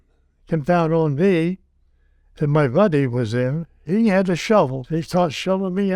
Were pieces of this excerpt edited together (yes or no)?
yes